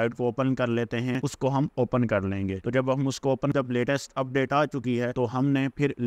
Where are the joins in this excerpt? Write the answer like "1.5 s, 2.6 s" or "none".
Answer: 1.2 s, 3.5 s

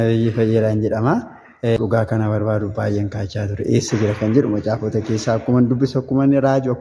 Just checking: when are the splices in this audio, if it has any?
1.8 s

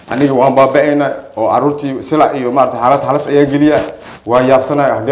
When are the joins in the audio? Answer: none

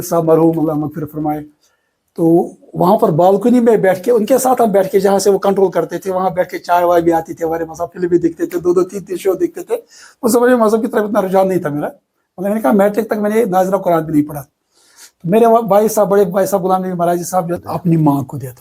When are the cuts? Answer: 17.6 s

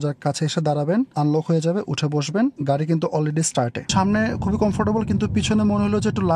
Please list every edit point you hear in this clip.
1.1 s, 2.6 s, 3.9 s

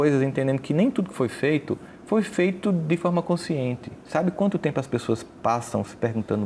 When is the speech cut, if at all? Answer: none

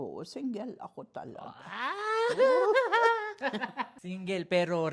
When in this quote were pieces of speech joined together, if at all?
3.8 s

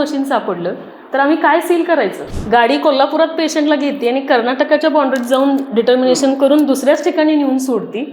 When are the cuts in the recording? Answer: 2.3 s

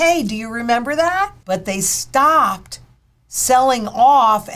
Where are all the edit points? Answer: 1.4 s

